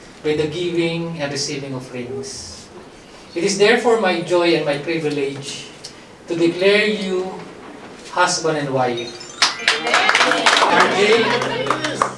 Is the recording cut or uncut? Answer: cut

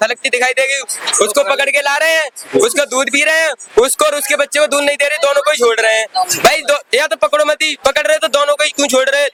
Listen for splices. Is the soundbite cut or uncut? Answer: uncut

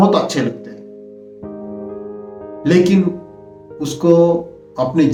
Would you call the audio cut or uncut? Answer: uncut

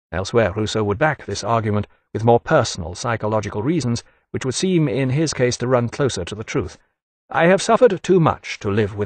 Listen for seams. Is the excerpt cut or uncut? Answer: cut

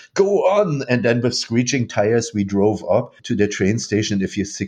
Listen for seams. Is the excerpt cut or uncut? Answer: cut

